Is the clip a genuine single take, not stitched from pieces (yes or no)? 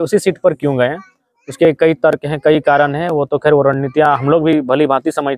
yes